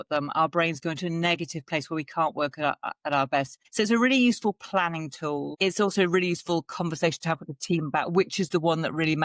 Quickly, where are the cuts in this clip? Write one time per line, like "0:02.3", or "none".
0:03.6
0:05.5